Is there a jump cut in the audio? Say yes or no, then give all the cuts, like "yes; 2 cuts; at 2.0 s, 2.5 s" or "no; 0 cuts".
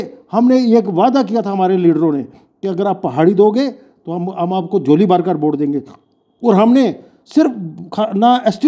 no; 0 cuts